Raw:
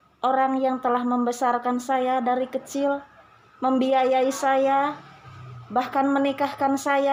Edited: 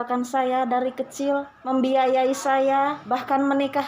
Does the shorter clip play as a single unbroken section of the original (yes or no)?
no